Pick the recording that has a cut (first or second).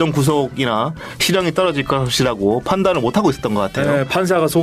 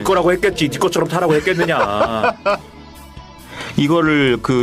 second